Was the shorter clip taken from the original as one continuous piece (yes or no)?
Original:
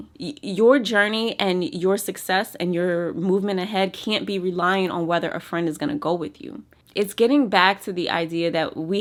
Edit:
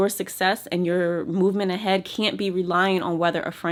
yes